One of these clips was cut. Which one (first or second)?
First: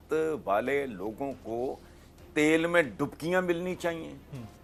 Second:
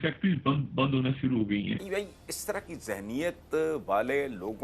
second